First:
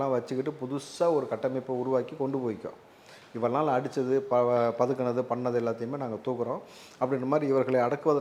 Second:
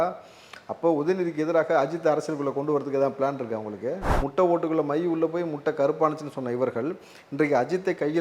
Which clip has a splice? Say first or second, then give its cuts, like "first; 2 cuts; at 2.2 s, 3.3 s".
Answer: second; 1 cut; at 4.1 s